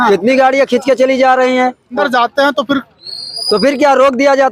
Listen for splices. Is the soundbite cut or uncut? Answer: cut